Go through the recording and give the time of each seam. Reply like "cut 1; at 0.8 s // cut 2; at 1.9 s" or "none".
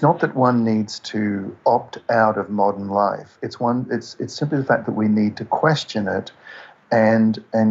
none